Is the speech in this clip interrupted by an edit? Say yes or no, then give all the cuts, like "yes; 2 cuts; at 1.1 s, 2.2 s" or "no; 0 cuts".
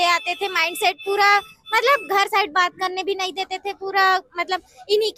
no; 0 cuts